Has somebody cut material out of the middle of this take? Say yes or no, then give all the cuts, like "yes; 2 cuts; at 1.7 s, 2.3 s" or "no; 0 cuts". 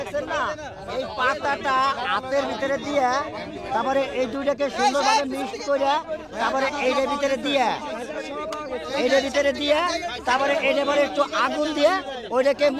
no; 0 cuts